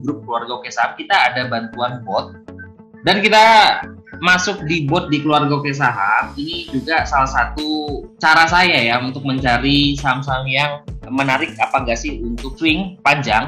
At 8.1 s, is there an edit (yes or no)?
yes